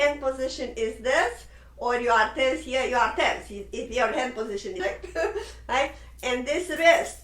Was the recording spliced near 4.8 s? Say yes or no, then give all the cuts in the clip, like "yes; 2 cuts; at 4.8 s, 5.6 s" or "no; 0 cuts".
yes; 1 cut; at 4.8 s